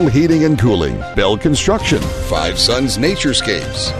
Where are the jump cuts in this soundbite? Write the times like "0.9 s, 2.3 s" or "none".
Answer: 1.0 s